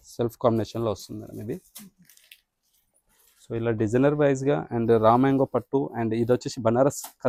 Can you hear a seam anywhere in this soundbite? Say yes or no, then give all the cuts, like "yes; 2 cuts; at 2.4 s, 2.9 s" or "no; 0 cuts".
no; 0 cuts